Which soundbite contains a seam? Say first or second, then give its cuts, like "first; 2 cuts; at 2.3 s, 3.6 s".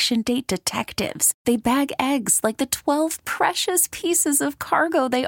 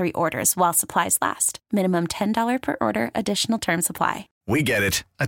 second; 1 cut; at 4.3 s